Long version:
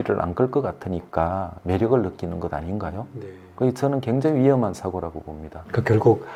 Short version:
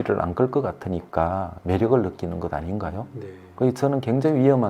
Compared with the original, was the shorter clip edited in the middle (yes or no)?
no